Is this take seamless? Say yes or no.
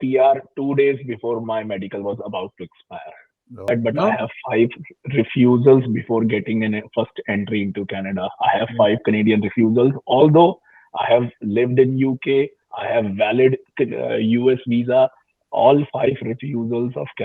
no